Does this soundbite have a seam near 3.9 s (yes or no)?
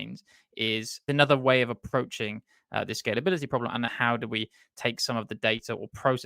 yes